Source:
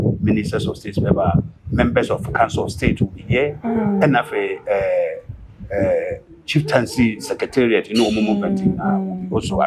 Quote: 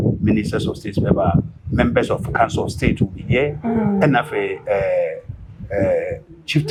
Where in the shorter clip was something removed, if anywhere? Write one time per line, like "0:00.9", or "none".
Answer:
none